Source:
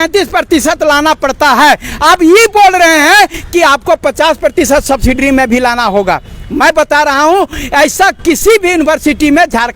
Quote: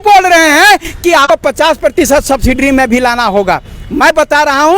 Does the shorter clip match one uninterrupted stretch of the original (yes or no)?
no